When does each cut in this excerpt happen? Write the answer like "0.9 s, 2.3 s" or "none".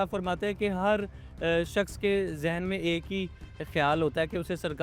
none